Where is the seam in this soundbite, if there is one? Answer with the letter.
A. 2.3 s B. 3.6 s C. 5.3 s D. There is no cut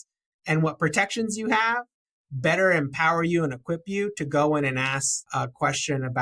C